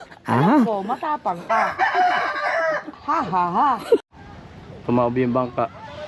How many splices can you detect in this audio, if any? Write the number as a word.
one